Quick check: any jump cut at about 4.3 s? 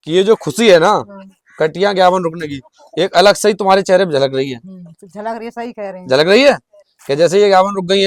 no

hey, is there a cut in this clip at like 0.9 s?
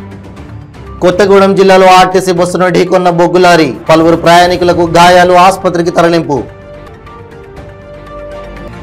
yes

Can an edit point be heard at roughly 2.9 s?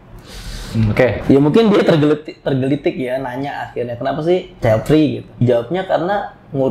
no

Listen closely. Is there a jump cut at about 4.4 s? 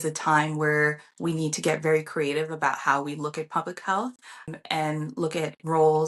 yes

